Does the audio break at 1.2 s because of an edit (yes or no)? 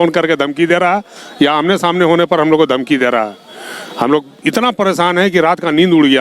no